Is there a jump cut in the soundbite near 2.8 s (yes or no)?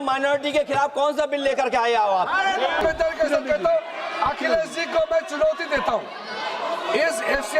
yes